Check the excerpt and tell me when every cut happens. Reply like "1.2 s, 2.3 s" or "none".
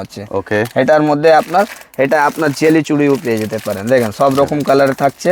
none

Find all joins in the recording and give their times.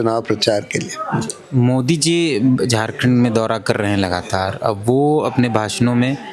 1.3 s

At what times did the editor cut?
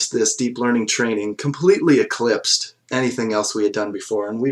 none

